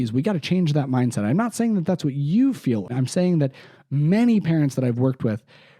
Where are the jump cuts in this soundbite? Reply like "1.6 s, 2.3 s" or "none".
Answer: 2.9 s